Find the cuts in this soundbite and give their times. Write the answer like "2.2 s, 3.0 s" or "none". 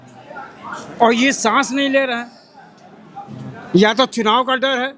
none